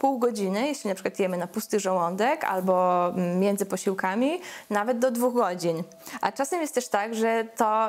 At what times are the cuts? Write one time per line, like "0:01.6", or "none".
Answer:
none